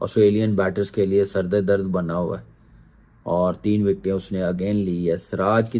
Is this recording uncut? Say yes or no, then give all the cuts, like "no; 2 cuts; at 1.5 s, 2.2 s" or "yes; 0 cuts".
yes; 0 cuts